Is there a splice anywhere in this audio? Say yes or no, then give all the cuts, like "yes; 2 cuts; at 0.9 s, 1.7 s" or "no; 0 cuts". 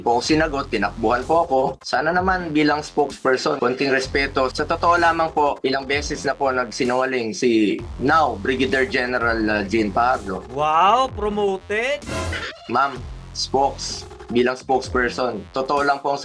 yes; 3 cuts; at 3.6 s, 4.5 s, 12.5 s